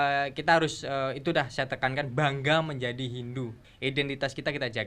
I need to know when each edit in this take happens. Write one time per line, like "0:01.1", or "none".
0:03.6